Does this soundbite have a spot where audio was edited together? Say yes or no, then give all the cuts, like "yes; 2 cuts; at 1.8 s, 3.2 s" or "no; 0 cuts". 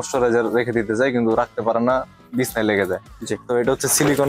no; 0 cuts